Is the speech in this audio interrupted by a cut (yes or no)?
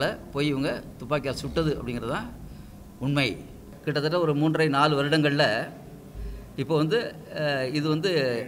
yes